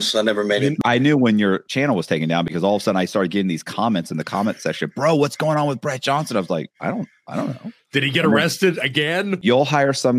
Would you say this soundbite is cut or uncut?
cut